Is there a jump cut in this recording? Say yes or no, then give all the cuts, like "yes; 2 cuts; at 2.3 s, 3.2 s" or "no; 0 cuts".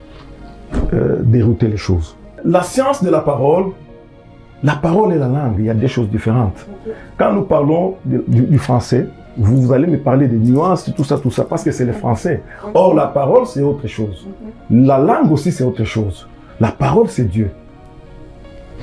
yes; 1 cut; at 2.4 s